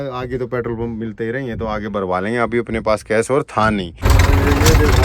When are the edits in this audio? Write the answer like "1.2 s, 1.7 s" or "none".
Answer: 4.0 s